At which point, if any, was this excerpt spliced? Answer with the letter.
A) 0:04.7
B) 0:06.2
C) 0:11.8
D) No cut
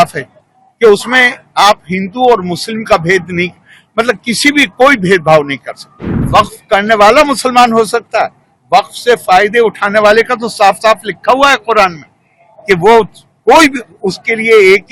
B